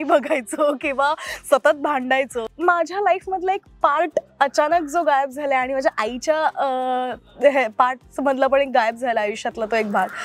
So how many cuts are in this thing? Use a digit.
1